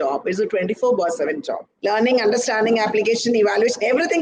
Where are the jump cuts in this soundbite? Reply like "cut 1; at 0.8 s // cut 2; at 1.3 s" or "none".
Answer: cut 1; at 1.7 s